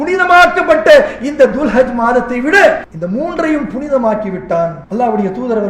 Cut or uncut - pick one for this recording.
cut